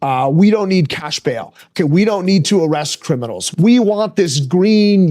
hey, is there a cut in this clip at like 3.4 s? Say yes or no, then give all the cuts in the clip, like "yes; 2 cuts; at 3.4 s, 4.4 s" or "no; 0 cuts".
yes; 1 cut; at 3.4 s